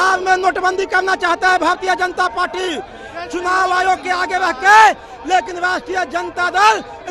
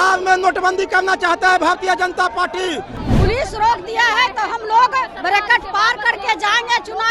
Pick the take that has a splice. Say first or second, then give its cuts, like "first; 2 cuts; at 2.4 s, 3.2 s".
second; 1 cut; at 3.0 s